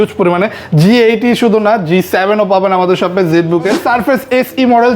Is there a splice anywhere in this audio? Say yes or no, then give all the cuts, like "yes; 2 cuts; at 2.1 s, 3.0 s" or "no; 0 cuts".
yes; 1 cut; at 3.8 s